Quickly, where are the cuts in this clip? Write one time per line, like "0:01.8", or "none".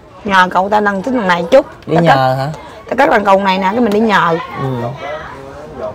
none